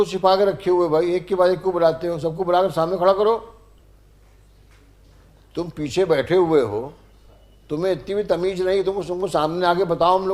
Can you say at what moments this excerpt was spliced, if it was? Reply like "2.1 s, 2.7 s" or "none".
3.8 s